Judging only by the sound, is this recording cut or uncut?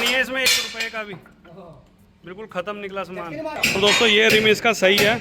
cut